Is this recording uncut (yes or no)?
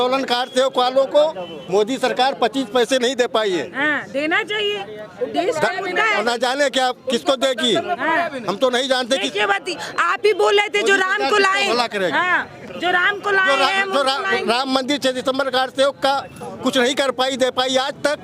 yes